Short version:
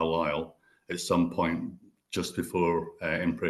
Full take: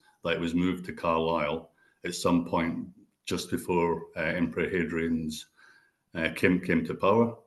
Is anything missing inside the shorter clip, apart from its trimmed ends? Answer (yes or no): no